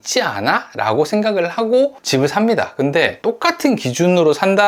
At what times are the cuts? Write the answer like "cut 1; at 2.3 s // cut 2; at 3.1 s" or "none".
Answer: none

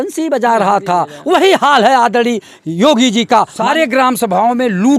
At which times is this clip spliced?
cut 1; at 3.6 s

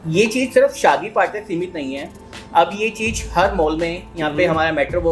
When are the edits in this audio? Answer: none

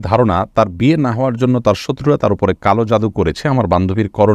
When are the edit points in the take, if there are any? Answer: none

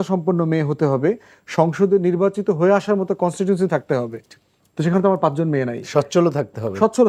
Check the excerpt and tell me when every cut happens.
none

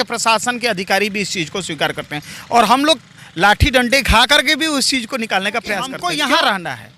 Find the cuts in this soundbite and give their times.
cut 1; at 5.9 s

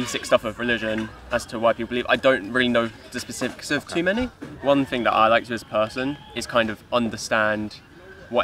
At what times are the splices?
cut 1; at 4.5 s

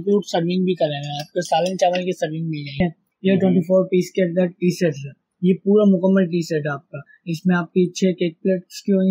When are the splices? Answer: cut 1; at 2.8 s

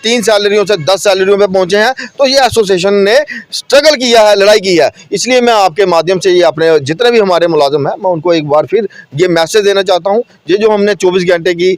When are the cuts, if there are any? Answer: none

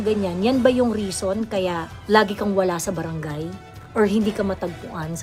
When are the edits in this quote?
none

